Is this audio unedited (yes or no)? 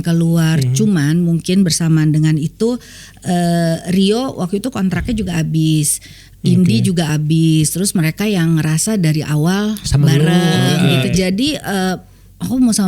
no